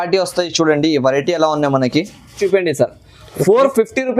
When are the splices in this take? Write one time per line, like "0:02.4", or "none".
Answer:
0:02.4